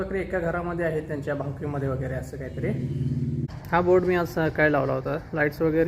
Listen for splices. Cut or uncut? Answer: cut